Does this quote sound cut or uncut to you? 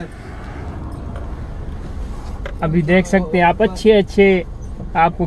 uncut